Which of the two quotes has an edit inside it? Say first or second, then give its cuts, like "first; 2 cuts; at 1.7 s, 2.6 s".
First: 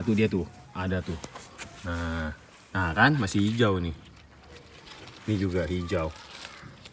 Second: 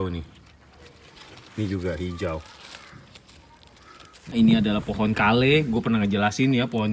second; 1 cut; at 4.3 s